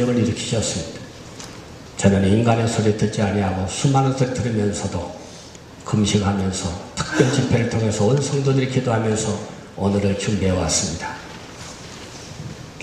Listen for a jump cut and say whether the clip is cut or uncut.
cut